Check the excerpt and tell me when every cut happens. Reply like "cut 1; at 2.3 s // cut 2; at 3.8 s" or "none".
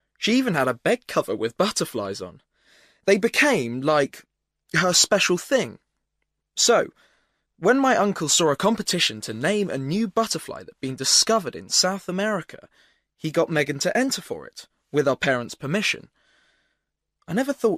none